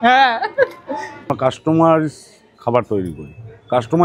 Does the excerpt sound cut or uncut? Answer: cut